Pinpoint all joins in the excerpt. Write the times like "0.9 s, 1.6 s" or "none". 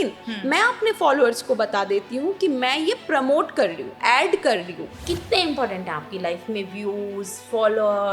4.8 s